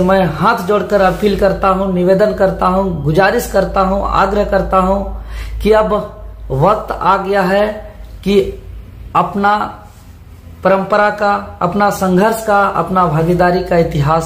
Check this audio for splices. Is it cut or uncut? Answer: uncut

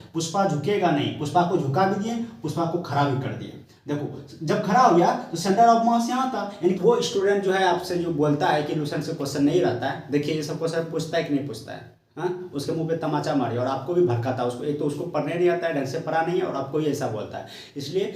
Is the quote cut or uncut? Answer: cut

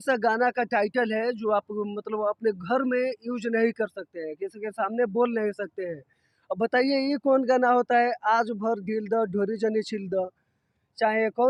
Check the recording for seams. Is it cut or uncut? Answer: uncut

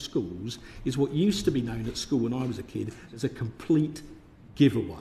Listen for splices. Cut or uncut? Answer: uncut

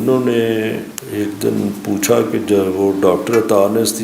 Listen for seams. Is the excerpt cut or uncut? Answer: cut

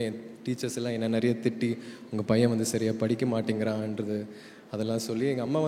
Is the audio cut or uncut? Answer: uncut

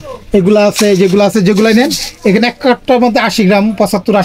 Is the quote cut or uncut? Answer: uncut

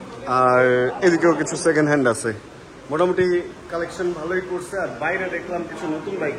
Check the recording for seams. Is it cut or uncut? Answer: uncut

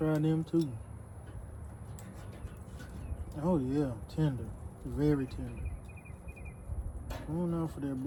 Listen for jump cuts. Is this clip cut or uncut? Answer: uncut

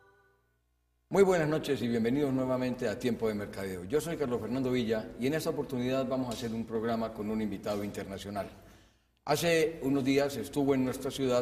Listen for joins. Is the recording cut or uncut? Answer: uncut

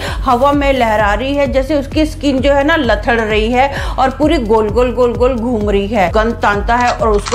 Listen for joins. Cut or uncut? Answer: cut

